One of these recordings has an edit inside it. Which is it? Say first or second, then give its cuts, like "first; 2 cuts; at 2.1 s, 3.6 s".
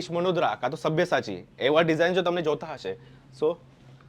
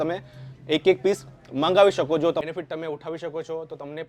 second; 1 cut; at 2.4 s